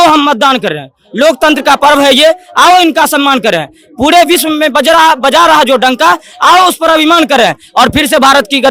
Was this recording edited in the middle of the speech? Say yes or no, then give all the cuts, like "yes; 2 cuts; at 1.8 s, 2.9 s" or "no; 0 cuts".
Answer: no; 0 cuts